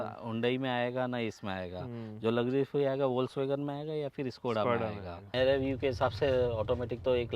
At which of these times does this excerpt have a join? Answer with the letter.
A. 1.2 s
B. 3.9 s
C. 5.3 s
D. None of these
C